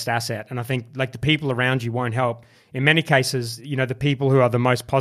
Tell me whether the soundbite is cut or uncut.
cut